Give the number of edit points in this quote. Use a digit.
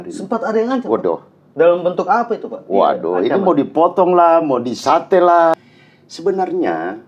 1